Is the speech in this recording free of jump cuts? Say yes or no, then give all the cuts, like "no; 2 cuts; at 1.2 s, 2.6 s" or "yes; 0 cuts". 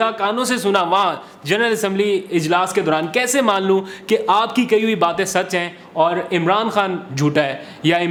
yes; 0 cuts